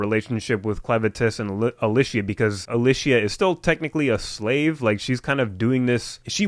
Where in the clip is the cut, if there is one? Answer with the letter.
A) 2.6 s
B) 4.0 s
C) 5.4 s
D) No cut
A